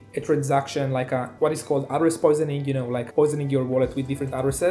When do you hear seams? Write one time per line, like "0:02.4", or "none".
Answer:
none